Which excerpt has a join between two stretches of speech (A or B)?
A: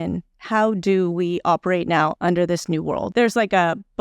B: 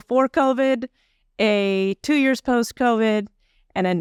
A